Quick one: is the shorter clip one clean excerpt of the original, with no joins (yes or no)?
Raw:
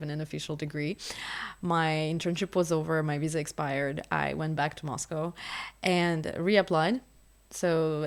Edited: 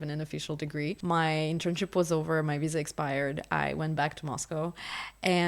no